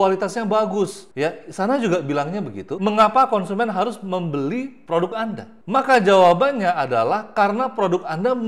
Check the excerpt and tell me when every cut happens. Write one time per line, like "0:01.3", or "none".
0:01.0
0:05.5